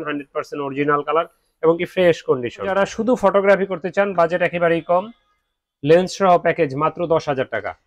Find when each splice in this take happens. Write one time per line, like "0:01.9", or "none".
0:02.7